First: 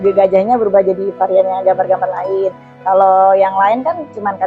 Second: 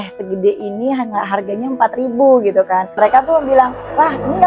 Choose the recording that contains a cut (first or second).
second